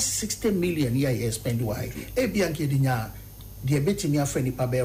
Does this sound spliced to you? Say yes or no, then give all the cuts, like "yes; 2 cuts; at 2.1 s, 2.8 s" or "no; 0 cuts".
no; 0 cuts